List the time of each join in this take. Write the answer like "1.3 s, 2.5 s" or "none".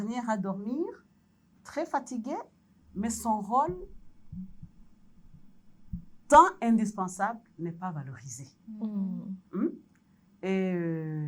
none